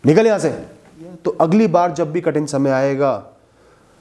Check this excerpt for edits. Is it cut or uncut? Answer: cut